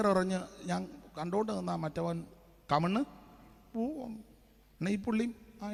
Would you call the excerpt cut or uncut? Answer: uncut